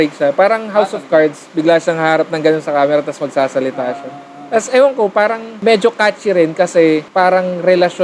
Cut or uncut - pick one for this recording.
cut